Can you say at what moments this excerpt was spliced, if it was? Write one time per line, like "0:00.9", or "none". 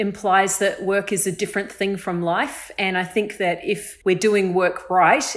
0:03.9

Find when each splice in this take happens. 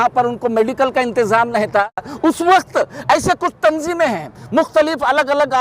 0:02.1

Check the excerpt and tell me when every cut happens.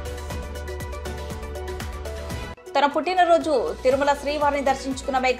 0:02.5

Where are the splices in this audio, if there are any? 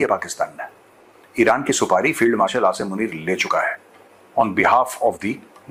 none

